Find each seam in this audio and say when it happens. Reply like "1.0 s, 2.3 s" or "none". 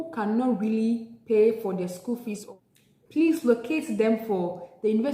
2.4 s